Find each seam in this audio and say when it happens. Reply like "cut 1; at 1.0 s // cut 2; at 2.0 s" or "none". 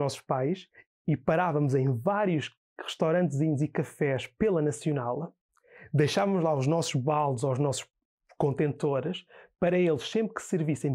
none